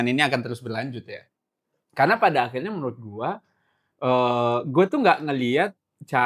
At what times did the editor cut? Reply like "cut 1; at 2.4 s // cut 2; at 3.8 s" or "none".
none